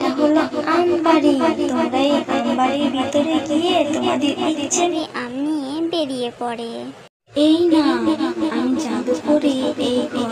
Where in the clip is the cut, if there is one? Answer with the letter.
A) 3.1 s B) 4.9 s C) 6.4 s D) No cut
B